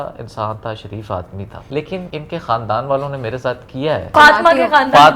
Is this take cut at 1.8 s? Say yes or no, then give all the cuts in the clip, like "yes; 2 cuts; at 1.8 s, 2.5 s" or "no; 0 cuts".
yes; 2 cuts; at 1.8 s, 4.1 s